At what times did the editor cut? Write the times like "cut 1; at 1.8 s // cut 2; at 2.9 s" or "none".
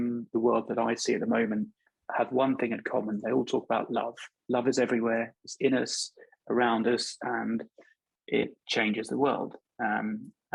cut 1; at 1.8 s